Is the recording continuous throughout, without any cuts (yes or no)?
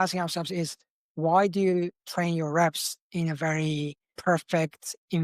no